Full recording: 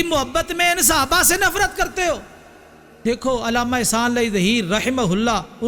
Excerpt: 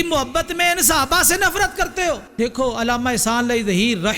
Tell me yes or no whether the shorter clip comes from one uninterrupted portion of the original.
no